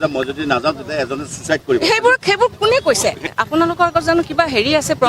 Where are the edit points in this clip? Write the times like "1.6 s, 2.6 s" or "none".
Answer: 3.3 s